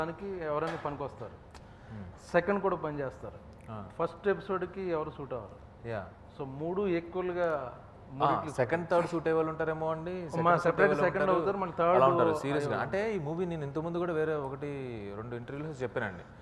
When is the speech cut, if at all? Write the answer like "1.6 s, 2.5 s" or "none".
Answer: none